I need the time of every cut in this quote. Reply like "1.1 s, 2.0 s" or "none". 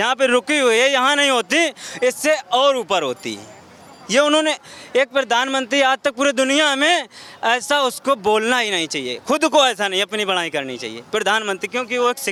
none